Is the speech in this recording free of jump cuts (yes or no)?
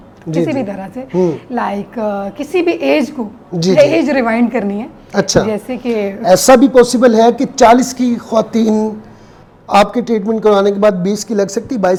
yes